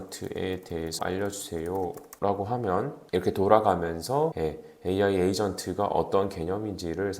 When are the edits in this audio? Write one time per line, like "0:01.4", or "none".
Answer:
0:01.0
0:02.1
0:03.0
0:04.4